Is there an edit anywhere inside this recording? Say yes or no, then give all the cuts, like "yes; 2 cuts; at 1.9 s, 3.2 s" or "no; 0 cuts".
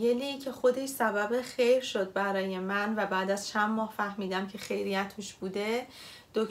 no; 0 cuts